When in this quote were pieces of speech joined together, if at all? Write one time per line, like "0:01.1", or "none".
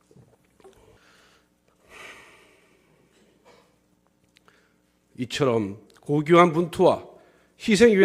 0:00.9